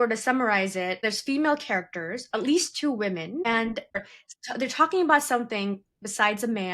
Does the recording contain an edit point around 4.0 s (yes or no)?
yes